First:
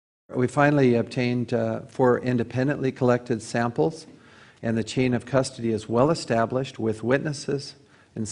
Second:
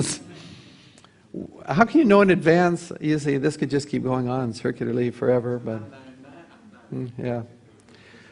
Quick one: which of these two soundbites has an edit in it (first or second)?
first